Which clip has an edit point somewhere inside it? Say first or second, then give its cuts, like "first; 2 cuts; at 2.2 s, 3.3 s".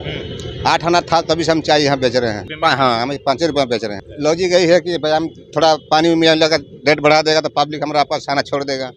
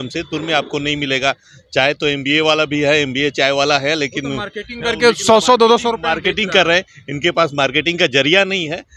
first; 2 cuts; at 2.5 s, 4.0 s